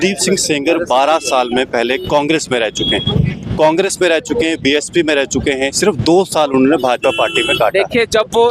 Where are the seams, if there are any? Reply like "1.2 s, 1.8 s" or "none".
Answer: none